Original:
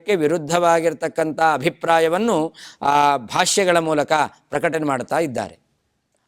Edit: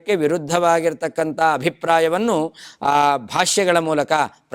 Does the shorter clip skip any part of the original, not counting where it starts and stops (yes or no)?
no